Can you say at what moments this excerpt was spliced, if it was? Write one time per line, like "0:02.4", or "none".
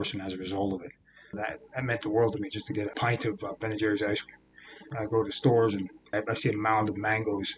0:01.3
0:02.9
0:04.8
0:06.1